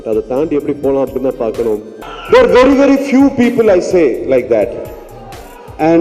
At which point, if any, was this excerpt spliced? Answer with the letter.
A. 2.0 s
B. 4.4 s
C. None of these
A